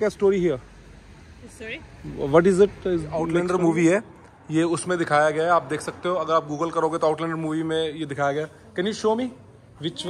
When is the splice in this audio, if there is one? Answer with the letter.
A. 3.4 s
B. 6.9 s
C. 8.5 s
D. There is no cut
A